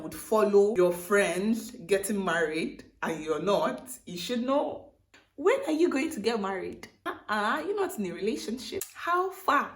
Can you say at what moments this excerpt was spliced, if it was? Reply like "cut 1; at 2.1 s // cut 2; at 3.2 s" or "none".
cut 1; at 0.7 s // cut 2; at 6.9 s // cut 3; at 8.9 s

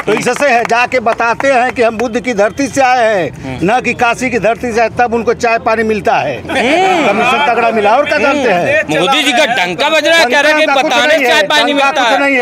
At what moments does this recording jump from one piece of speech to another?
none

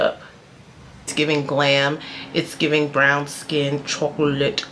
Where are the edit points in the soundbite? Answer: cut 1; at 1.1 s

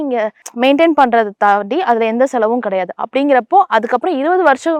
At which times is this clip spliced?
none

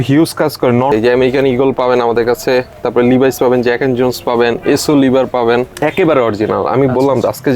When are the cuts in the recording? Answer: cut 1; at 0.9 s // cut 2; at 5.8 s

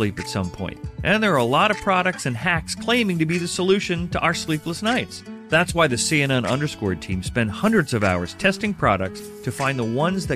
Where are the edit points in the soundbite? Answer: none

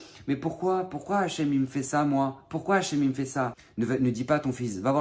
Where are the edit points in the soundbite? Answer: cut 1; at 3.6 s

